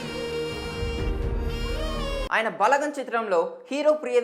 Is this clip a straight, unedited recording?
no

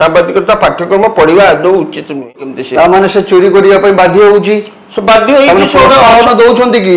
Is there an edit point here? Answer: yes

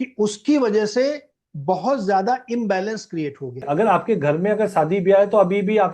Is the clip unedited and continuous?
no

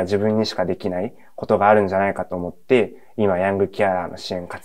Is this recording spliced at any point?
no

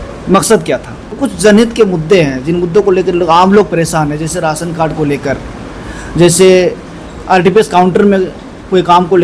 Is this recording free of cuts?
no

